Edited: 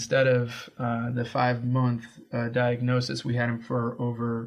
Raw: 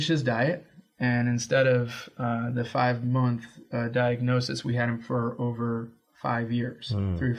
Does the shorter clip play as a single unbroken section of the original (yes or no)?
yes